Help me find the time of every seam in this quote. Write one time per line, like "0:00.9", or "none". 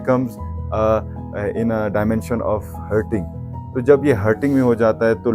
none